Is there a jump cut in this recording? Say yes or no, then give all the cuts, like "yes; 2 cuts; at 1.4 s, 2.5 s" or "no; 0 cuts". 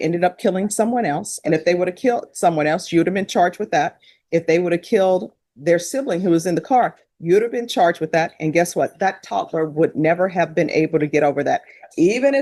no; 0 cuts